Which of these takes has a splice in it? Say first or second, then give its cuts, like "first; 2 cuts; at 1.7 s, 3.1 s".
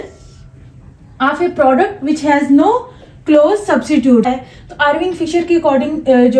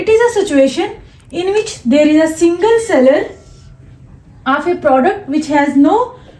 first; 1 cut; at 4.3 s